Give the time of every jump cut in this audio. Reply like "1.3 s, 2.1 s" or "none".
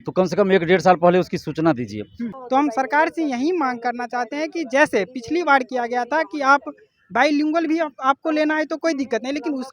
2.2 s